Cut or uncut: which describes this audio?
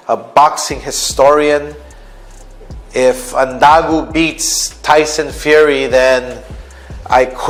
uncut